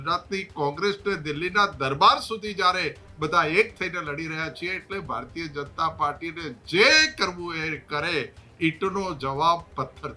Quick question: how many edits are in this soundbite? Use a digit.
0